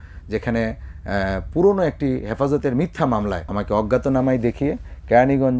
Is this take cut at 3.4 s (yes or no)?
yes